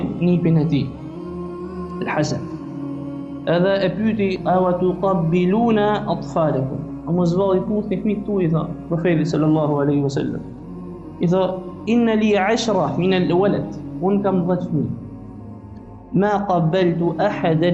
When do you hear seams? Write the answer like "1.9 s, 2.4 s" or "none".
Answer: none